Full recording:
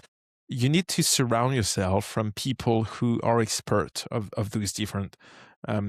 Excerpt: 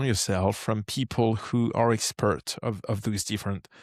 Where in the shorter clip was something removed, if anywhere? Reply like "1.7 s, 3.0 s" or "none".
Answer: none